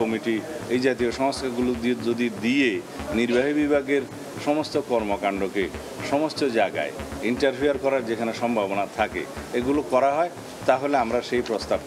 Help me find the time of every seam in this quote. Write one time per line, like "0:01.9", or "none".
none